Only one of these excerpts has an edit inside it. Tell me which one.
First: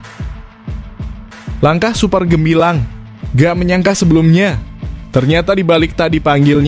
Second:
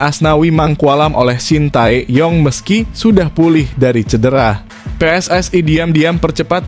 first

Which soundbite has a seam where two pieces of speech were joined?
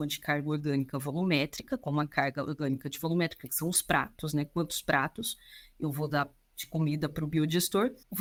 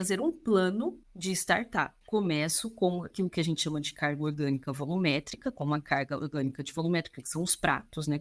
second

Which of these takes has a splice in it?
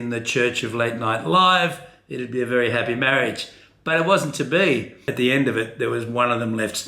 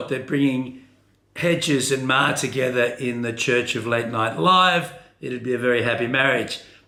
first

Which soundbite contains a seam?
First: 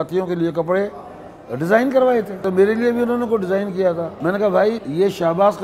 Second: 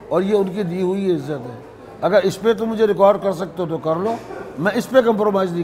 first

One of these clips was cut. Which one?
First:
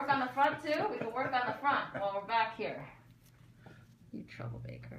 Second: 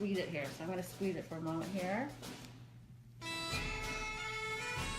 second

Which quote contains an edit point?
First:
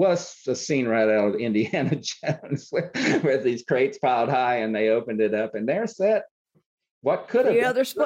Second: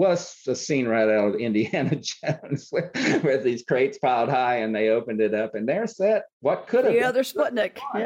second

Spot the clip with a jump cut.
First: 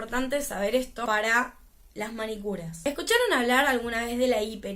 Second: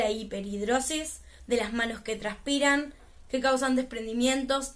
first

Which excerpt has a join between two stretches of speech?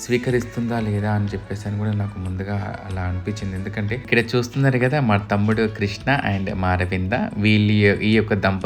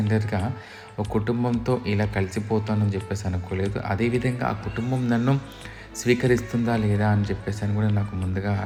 first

